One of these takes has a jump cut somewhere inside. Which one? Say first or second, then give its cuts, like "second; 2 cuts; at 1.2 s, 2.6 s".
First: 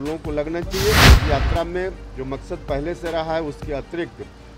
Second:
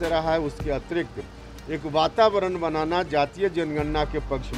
first; 1 cut; at 1.1 s